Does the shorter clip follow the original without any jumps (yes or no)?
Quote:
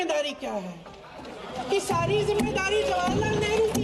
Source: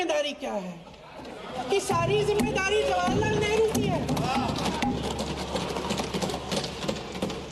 yes